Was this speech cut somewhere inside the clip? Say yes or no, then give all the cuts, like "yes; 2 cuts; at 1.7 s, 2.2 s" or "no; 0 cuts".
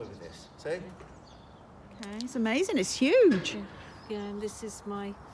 yes; 1 cut; at 2.1 s